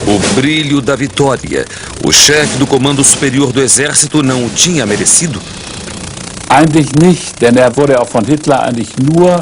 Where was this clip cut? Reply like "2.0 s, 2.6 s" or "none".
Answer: 4.4 s